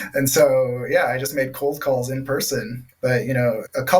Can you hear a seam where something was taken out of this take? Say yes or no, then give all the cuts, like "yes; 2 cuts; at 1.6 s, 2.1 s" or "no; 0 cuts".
yes; 1 cut; at 2.8 s